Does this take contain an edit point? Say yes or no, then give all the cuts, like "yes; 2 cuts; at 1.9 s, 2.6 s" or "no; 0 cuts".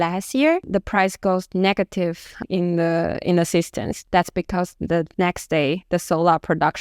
no; 0 cuts